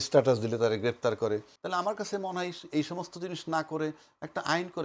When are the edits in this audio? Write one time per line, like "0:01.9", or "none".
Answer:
0:01.5